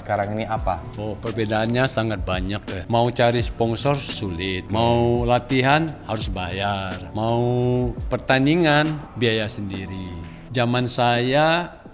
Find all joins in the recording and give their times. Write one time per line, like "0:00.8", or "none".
0:00.9
0:02.7
0:04.6
0:07.0
0:08.0
0:09.1
0:10.4